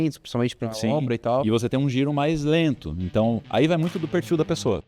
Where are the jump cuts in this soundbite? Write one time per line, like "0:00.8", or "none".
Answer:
0:03.4

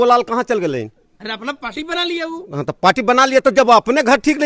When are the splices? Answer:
none

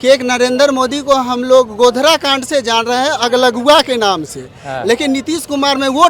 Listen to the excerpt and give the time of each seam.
none

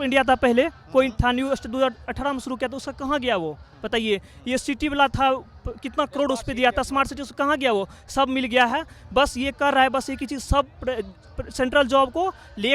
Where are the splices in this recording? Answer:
none

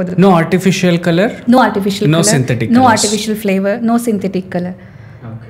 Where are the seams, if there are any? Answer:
none

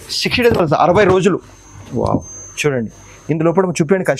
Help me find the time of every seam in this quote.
none

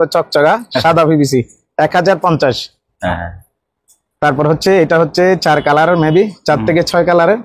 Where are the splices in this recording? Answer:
none

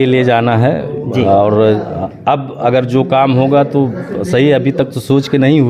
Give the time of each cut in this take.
none

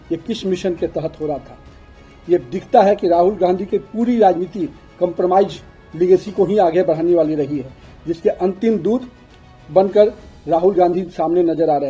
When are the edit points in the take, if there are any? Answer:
0:01.8

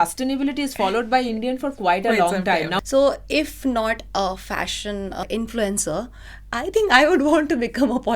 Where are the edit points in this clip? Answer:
0:02.8
0:05.2

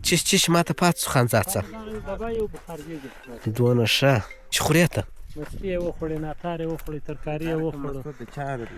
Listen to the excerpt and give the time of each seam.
none

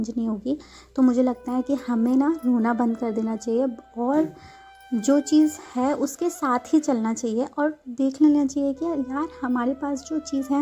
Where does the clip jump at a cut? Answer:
none

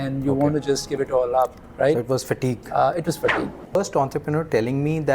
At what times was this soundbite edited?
0:03.8

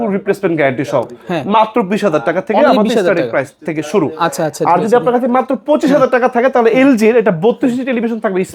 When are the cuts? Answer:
none

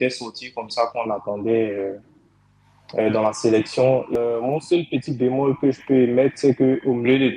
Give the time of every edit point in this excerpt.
0:04.2

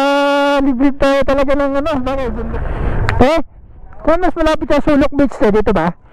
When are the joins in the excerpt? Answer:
0:02.5

